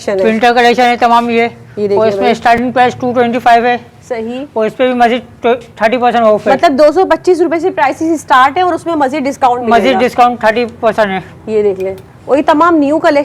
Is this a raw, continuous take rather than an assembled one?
yes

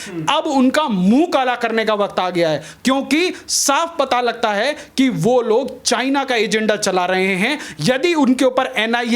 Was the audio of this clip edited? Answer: no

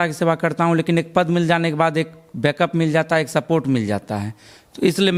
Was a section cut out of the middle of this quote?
no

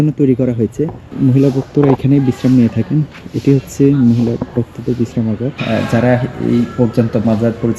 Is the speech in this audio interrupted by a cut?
yes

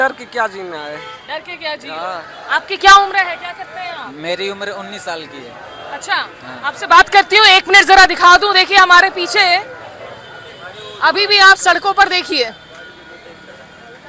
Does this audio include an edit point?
no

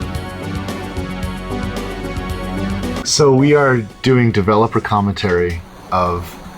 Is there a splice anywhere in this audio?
yes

